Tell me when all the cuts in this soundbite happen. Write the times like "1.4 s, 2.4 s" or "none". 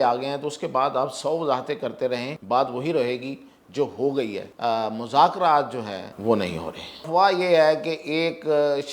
2.3 s, 4.5 s, 6.1 s, 7.1 s